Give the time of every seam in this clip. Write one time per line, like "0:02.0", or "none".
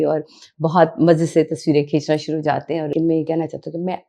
0:02.9